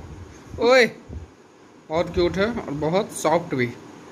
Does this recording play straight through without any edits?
yes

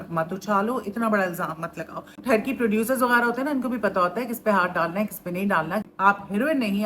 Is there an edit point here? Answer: yes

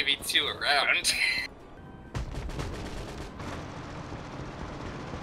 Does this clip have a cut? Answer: yes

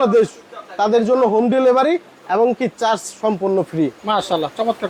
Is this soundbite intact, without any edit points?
yes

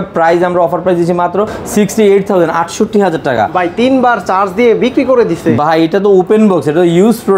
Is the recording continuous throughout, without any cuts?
yes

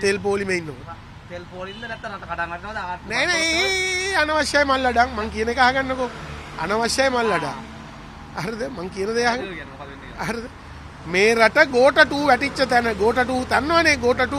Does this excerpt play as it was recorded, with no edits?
yes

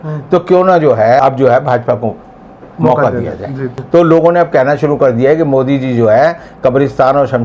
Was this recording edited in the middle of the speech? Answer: yes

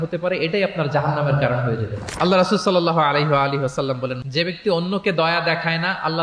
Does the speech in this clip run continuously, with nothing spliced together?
no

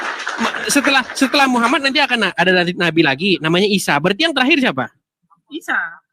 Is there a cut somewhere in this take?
no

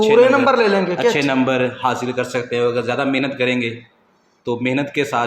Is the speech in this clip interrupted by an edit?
no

